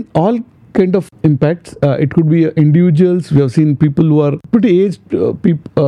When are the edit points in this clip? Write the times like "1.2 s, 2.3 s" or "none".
1.1 s, 4.4 s